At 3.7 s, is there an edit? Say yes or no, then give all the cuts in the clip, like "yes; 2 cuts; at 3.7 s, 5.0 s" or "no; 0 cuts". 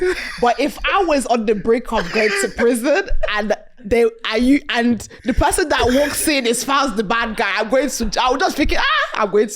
no; 0 cuts